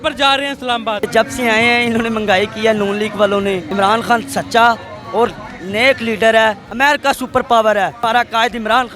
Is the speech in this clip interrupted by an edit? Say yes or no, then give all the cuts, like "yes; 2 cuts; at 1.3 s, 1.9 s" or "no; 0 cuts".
yes; 3 cuts; at 1.0 s, 3.6 s, 6.7 s